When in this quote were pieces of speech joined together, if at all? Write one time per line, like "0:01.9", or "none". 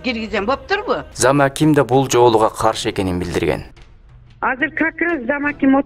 0:01.1